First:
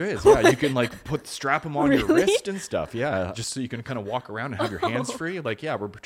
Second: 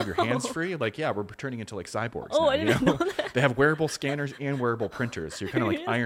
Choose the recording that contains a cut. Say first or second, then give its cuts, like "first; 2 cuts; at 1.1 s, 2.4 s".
first; 1 cut; at 3.3 s